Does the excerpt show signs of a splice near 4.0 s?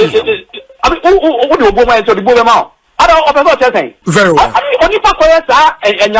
yes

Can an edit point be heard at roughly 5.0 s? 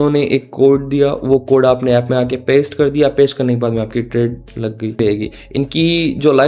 yes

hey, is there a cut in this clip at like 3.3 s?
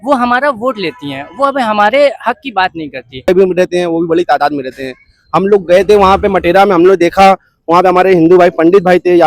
yes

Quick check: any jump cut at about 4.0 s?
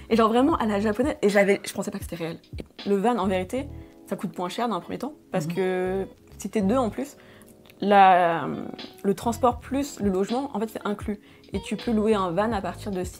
no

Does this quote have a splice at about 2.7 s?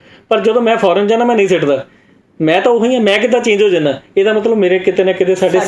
no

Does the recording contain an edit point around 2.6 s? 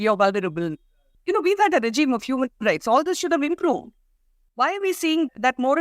no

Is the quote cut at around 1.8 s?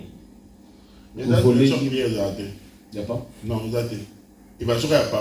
yes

